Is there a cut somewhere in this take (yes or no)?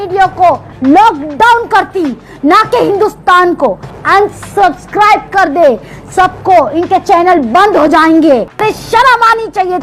yes